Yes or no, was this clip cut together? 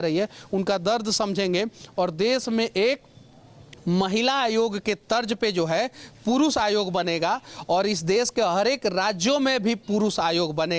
no